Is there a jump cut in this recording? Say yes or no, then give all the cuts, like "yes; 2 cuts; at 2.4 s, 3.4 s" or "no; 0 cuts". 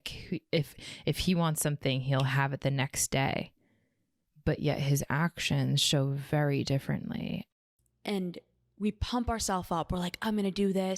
yes; 1 cut; at 7.4 s